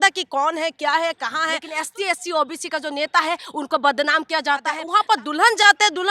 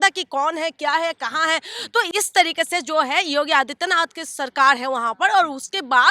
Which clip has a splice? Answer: first; 2 cuts; at 1.6 s, 4.8 s

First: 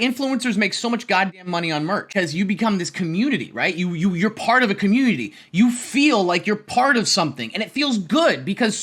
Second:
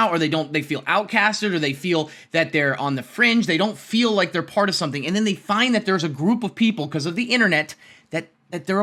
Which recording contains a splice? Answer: first; 1 cut; at 2.1 s

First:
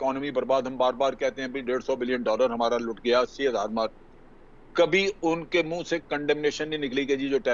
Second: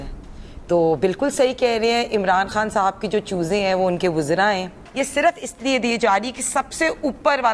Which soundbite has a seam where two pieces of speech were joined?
second; 1 cut; at 4.8 s

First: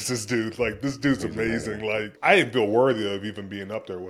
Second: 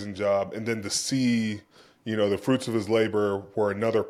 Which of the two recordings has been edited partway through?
first; 1 cut; at 2.1 s

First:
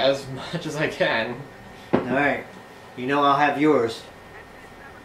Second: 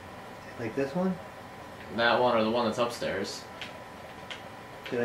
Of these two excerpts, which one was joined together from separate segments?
first; 1 cut; at 3.2 s

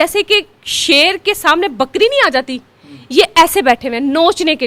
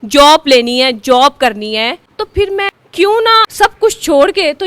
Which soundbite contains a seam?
second; 2 cuts; at 2.2 s, 3.5 s

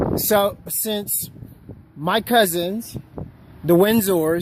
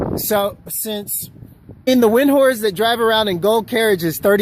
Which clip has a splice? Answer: first; 1 cut; at 1.8 s

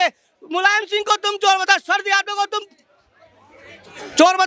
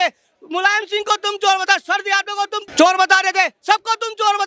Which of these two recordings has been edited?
second; 1 cut; at 2.6 s

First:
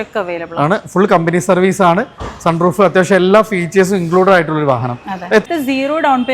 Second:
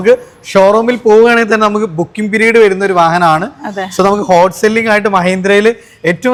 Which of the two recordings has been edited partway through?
first; 1 cut; at 5.4 s

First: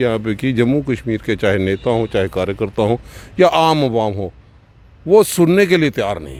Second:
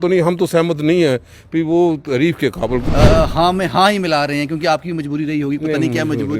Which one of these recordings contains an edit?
second; 1 cut; at 2.9 s

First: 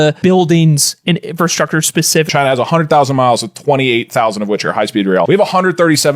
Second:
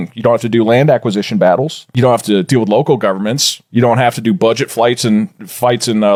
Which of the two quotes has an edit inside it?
first; 2 cuts; at 2.3 s, 5.3 s

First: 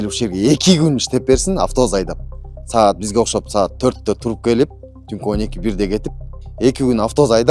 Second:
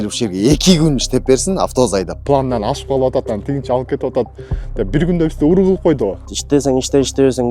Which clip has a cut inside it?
second; 2 cuts; at 2.2 s, 6.3 s

